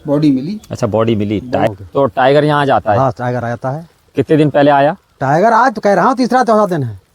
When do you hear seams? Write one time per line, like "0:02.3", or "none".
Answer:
0:01.7